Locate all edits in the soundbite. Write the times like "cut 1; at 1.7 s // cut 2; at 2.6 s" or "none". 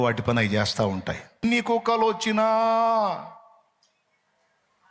cut 1; at 1.4 s